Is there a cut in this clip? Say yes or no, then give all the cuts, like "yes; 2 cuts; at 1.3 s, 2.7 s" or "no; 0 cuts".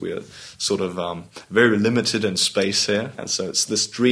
yes; 1 cut; at 3.2 s